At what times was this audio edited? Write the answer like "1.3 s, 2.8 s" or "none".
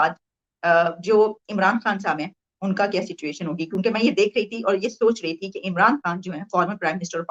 none